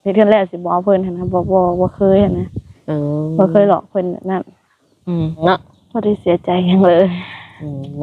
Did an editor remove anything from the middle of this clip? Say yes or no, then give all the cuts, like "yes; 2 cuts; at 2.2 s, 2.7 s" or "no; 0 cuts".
yes; 1 cut; at 5.4 s